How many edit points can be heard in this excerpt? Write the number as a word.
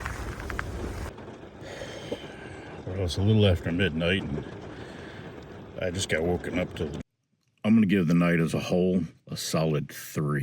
two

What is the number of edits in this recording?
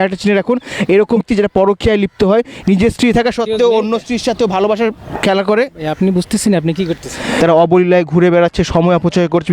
two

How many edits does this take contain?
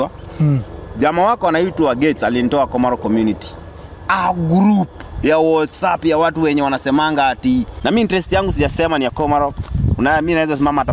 one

